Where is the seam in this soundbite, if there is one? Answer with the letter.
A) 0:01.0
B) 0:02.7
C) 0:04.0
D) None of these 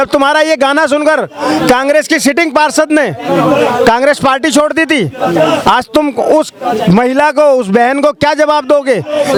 D